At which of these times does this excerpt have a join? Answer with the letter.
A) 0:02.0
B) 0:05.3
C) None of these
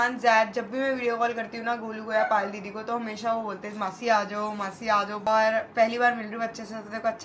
B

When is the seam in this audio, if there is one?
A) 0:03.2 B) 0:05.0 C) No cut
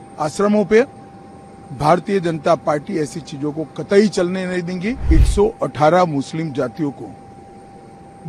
B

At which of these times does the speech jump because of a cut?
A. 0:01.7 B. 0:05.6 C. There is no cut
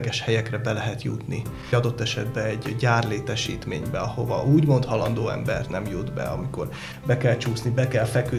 A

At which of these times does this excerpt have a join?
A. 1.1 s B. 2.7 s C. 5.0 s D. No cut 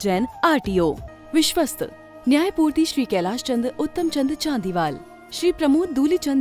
A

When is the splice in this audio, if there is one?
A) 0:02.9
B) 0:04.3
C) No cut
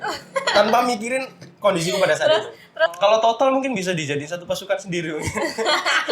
A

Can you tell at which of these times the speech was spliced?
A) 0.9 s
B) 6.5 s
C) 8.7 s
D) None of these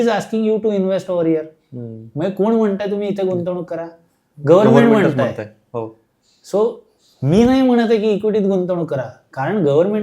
D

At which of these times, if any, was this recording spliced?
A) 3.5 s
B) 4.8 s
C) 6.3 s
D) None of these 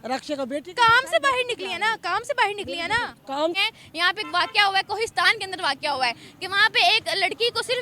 A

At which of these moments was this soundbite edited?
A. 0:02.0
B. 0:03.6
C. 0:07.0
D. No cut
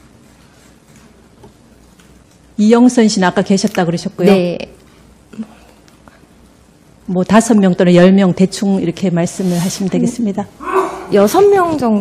B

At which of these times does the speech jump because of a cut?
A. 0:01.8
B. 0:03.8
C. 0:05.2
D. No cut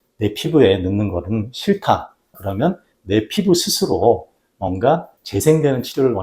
C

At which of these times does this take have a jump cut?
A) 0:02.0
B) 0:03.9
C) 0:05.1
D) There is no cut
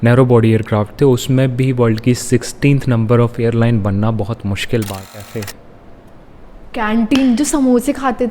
C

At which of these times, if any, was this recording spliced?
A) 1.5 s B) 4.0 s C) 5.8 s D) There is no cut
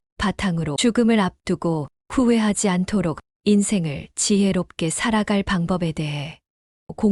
D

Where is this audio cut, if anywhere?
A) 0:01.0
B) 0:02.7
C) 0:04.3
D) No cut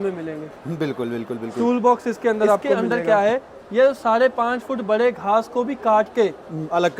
B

